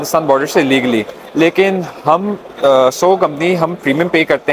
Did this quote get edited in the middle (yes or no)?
no